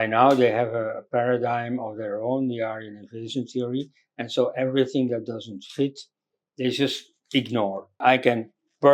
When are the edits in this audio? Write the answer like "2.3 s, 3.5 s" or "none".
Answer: 8.0 s

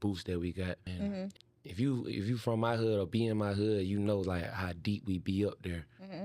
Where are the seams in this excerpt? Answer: 1.3 s

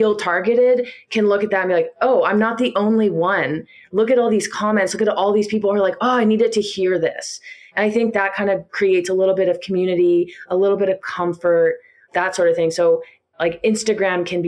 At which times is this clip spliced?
12.1 s

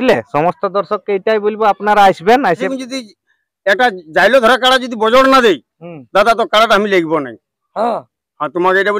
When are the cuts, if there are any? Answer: 2.7 s

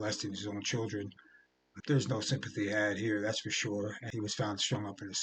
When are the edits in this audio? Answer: 1.7 s, 4.0 s

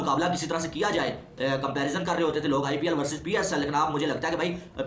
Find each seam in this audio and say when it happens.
none

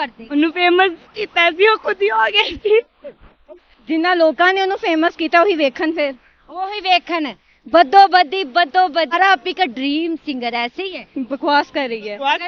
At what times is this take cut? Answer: 9.1 s

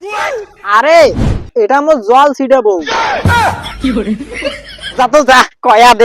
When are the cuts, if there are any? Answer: 4.8 s

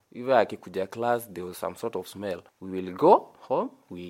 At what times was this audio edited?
2.5 s

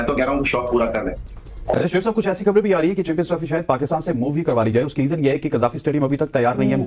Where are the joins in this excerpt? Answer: 1.6 s

